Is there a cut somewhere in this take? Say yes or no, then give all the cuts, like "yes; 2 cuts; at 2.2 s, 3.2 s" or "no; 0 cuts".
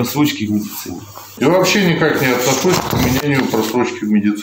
yes; 1 cut; at 1.2 s